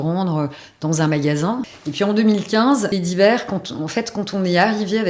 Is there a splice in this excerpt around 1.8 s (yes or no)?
yes